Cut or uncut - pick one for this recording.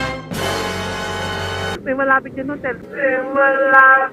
cut